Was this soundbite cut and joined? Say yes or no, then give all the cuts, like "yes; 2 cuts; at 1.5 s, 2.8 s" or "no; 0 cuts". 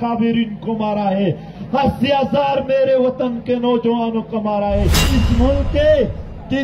yes; 2 cuts; at 1.5 s, 5.1 s